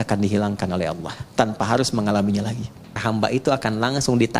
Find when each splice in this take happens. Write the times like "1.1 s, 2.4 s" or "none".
3.0 s